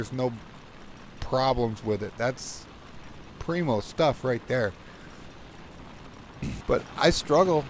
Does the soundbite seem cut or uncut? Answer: cut